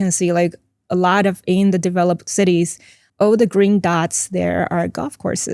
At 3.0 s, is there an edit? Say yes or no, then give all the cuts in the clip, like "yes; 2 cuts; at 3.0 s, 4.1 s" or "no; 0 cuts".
yes; 1 cut; at 3.0 s